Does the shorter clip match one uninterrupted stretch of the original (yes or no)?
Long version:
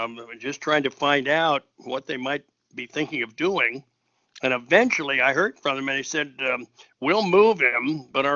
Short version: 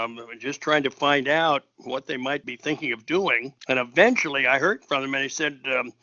no